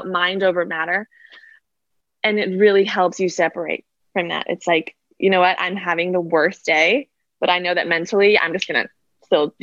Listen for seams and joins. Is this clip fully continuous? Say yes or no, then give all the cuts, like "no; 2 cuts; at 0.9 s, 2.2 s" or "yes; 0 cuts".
yes; 0 cuts